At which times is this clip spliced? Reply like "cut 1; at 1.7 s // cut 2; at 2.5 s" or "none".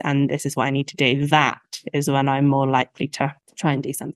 none